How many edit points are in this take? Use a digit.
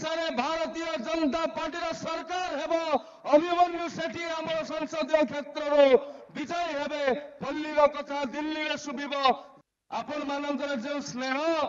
1